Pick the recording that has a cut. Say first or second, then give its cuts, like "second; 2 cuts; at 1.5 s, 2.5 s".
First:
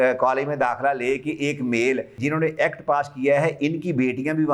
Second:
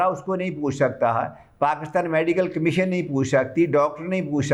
first; 1 cut; at 2.2 s